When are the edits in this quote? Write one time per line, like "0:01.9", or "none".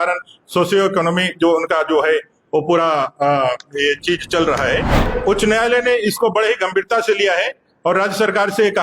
0:05.1